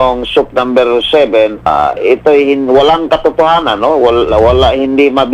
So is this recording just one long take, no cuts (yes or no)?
no